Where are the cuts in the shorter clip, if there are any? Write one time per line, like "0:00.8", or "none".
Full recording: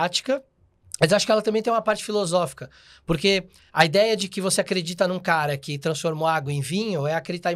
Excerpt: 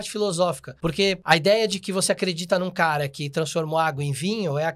0:01.0